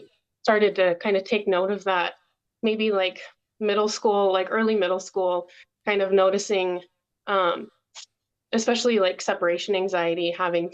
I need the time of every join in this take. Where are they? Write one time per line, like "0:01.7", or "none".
none